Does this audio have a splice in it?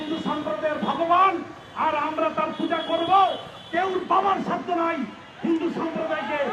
no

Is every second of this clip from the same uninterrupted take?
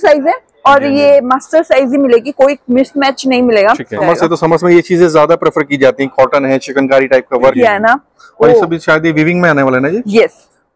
no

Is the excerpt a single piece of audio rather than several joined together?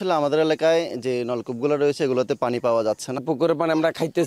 no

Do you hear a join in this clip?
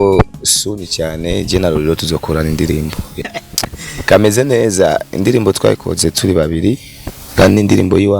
yes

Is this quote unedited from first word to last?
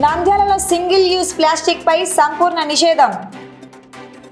yes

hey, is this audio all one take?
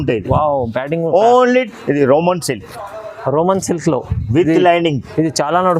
no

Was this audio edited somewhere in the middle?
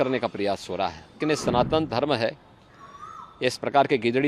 yes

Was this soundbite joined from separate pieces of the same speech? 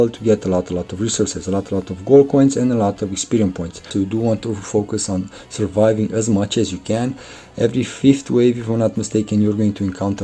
yes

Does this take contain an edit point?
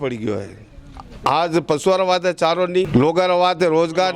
yes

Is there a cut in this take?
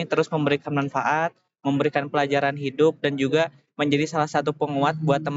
no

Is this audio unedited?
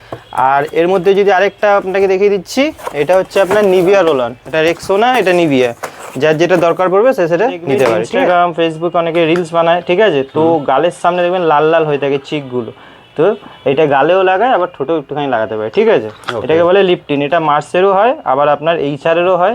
no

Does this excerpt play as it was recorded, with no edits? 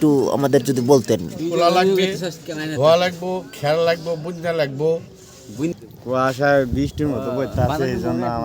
no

